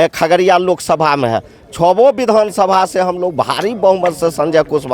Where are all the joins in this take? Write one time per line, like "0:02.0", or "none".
none